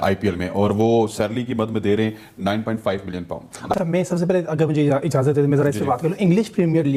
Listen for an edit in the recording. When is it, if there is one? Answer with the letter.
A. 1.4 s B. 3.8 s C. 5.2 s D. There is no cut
D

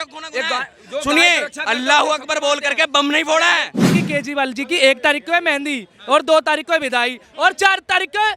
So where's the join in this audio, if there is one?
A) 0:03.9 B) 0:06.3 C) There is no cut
A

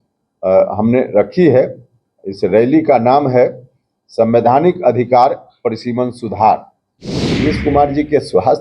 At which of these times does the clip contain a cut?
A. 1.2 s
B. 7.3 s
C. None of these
B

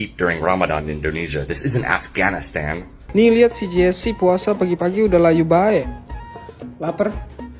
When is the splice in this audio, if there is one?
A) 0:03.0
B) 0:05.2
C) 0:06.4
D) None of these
A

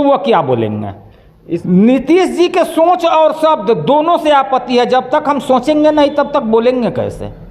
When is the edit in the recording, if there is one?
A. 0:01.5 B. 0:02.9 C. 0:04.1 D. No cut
A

